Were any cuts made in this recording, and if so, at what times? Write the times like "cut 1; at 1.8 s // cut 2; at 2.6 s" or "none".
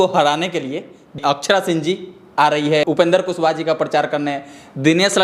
cut 1; at 1.2 s // cut 2; at 2.8 s